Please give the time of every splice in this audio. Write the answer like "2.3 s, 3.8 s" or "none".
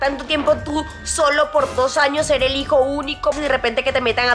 3.3 s